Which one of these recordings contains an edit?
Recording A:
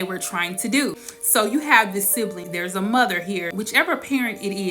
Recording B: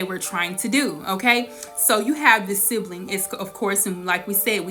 A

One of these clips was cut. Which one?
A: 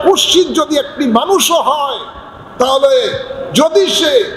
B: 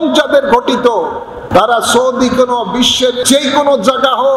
B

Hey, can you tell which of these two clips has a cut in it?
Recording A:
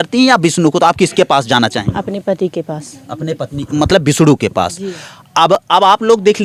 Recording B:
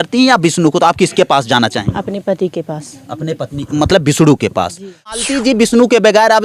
B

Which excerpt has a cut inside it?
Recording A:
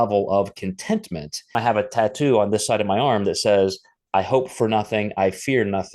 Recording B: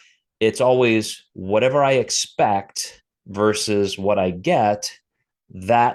A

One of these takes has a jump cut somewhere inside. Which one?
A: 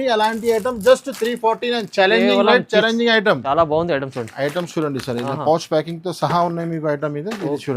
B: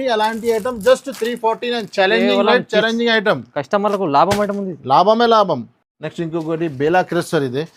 A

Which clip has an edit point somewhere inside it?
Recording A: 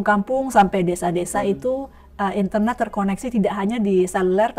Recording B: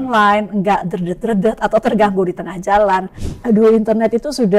B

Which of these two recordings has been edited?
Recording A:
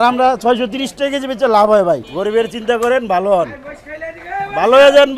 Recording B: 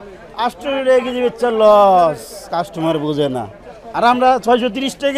A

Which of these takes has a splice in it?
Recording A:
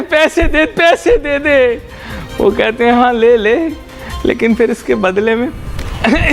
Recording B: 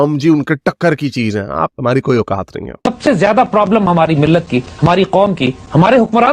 B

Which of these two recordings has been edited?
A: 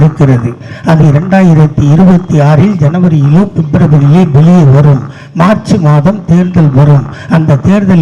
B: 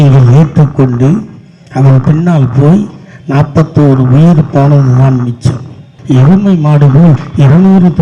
B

